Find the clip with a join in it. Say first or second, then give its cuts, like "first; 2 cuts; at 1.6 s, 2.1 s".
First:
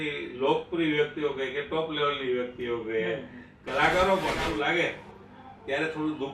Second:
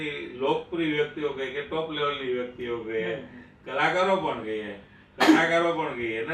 first; 1 cut; at 4.4 s